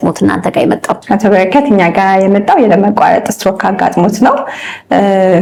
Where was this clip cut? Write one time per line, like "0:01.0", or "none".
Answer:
none